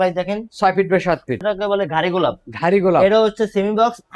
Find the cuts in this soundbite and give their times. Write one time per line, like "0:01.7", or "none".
0:01.4